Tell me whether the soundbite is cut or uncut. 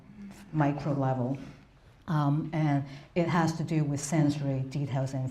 uncut